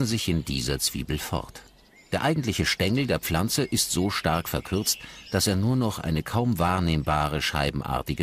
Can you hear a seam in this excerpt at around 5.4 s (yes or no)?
yes